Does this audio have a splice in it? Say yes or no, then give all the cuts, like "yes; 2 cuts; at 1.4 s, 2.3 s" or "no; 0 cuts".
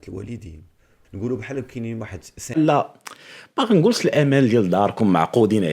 yes; 2 cuts; at 1.0 s, 2.6 s